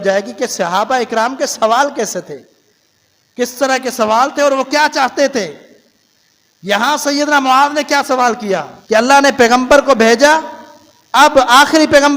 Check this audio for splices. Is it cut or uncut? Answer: cut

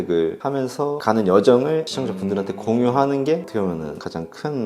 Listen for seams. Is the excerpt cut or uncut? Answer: cut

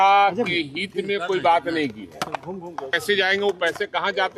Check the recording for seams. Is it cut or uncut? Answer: cut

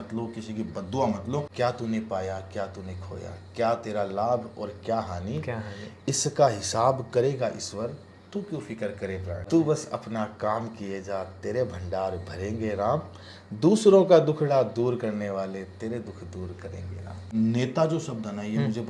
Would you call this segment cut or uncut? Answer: cut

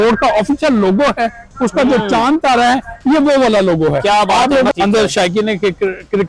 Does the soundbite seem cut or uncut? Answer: cut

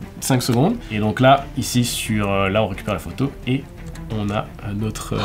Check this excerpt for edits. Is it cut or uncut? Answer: uncut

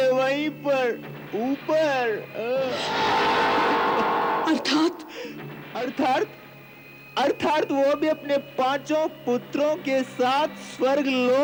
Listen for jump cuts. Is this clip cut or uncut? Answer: uncut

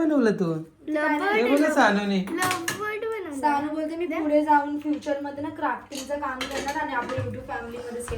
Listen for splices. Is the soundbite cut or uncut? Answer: uncut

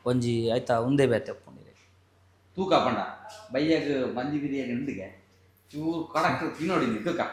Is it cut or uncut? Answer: uncut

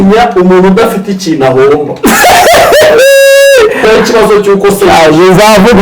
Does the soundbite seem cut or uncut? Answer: cut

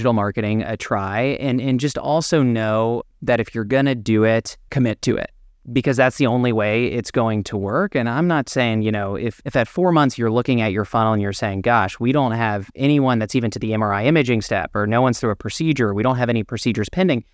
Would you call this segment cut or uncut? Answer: cut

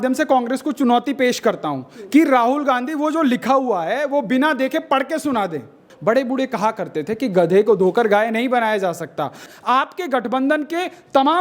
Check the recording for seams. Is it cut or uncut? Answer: cut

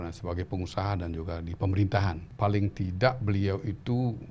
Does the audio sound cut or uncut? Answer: cut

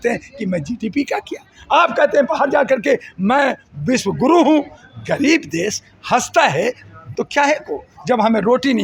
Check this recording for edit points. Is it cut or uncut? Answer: uncut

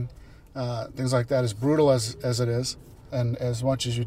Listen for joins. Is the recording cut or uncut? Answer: cut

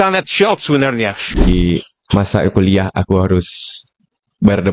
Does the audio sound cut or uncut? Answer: cut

